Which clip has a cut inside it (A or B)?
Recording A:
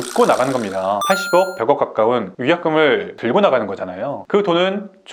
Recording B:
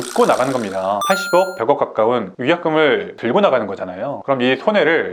B